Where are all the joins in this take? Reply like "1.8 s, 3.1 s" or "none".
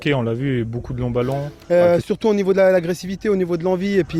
1.5 s